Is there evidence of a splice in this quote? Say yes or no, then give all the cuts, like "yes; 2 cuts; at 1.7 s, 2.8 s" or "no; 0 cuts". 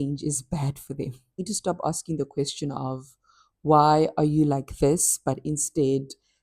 yes; 1 cut; at 1.5 s